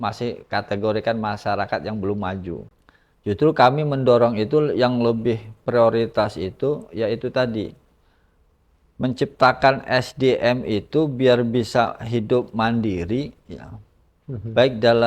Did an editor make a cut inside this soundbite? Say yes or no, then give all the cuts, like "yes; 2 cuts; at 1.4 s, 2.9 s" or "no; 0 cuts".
yes; 1 cut; at 2.6 s